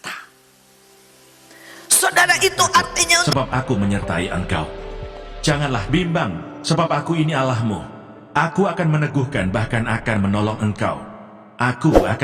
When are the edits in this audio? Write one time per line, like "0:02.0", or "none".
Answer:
0:03.2